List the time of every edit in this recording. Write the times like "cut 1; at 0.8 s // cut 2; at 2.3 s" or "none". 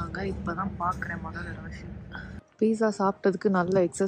cut 1; at 2.4 s